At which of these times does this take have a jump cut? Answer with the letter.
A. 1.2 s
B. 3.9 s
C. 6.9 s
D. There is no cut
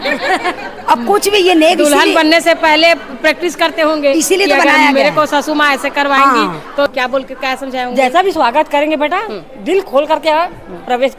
C